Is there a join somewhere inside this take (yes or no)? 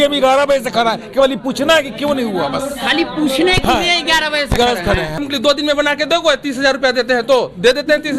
yes